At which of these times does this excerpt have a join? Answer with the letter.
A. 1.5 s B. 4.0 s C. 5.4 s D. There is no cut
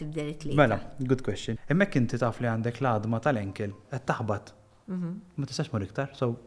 A